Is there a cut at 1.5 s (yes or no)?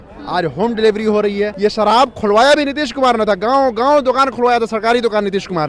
yes